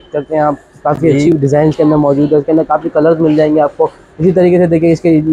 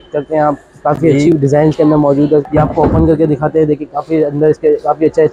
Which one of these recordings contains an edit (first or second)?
second